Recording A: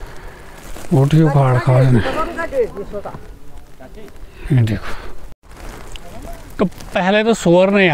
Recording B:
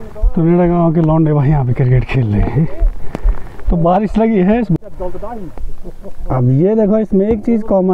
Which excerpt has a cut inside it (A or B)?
B